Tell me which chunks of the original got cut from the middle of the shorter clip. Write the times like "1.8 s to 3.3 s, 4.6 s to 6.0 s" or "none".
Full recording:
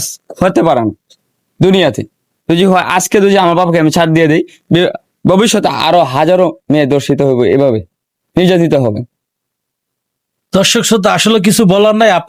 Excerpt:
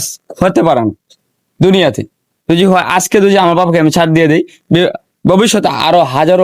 none